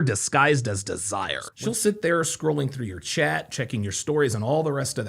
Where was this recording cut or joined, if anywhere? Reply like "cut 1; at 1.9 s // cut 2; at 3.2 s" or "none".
cut 1; at 1.4 s

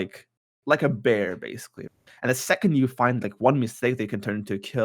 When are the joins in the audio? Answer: cut 1; at 1.8 s

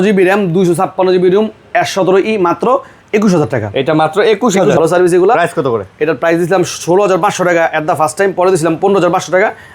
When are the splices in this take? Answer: cut 1; at 4.8 s

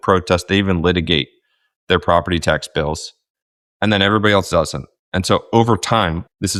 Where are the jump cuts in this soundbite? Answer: none

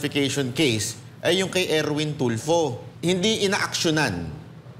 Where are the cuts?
cut 1; at 2.9 s

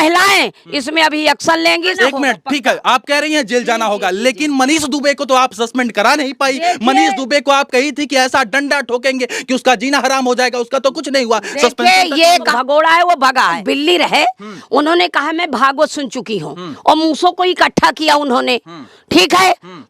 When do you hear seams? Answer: cut 1; at 1.9 s // cut 2; at 12.6 s // cut 3; at 13.6 s

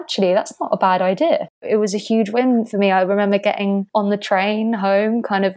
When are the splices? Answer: cut 1; at 1.6 s

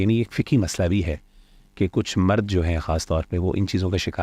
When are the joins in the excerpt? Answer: none

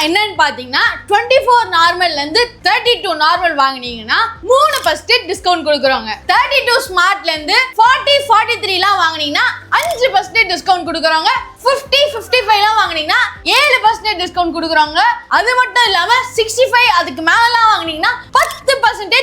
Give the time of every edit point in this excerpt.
none

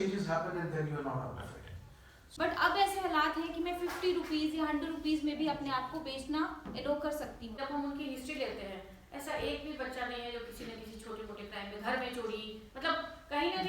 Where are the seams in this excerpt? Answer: cut 1; at 2.2 s // cut 2; at 7.4 s

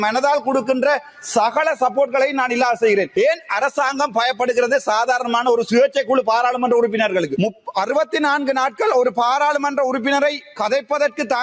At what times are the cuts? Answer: cut 1; at 3.1 s // cut 2; at 7.4 s

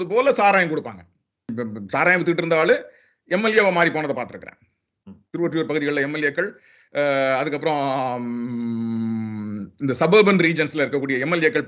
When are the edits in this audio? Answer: cut 1; at 1.5 s

